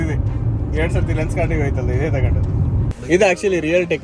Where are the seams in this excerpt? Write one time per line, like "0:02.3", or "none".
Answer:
0:02.9